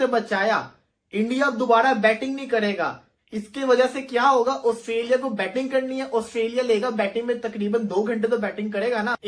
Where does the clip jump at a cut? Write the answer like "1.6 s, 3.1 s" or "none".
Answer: none